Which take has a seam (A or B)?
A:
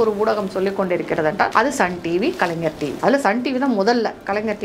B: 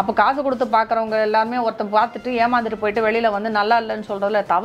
A